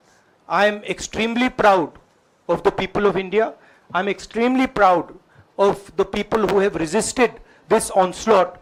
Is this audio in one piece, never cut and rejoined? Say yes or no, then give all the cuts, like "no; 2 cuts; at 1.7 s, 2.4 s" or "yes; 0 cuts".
yes; 0 cuts